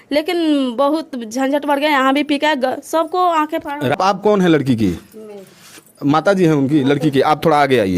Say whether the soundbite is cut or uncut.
cut